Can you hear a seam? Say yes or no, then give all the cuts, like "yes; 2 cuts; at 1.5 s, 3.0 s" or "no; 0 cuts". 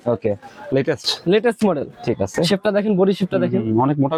no; 0 cuts